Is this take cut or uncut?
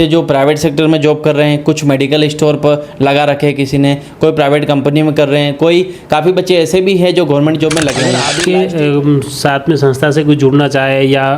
cut